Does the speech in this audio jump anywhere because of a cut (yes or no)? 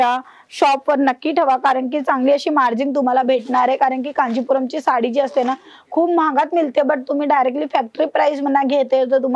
no